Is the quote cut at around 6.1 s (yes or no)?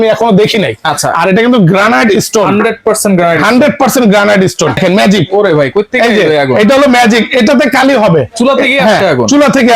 no